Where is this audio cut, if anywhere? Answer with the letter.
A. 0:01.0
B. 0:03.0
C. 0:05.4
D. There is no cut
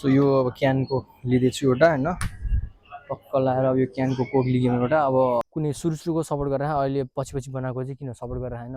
C